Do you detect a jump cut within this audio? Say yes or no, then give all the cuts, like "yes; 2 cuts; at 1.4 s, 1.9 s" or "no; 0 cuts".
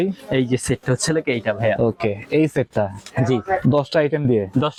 no; 0 cuts